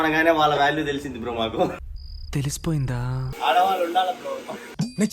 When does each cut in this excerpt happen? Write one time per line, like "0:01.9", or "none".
0:03.3